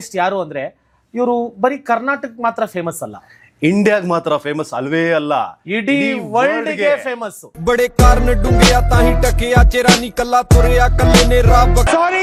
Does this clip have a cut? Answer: no; 0 cuts

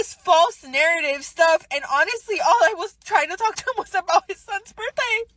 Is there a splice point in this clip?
no; 0 cuts

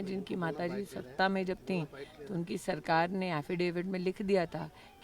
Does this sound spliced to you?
yes; 1 cut; at 4.0 s

